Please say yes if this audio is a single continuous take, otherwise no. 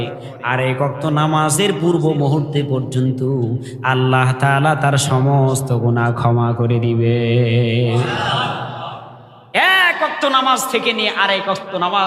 yes